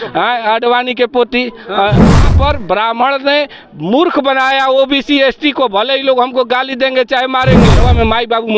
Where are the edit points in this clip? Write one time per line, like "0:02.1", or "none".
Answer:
0:02.3
0:07.8